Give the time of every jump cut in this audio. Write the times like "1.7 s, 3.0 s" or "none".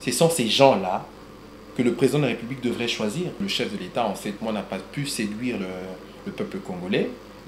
3.4 s